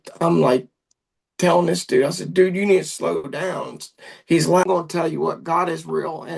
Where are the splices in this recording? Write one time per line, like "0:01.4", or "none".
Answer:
0:04.6